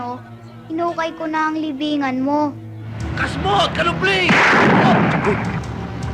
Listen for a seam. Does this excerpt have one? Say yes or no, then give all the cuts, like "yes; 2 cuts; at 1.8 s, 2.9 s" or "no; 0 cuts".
yes; 1 cut; at 3.1 s